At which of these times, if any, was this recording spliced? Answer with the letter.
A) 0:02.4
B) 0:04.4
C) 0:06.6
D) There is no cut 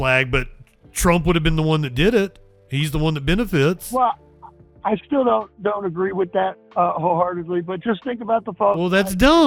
D